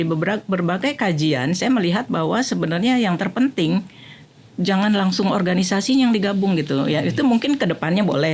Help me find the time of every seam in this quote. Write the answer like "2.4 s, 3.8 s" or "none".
none